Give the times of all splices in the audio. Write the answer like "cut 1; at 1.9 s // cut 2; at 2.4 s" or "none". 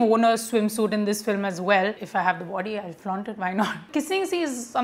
cut 1; at 2.0 s // cut 2; at 3.9 s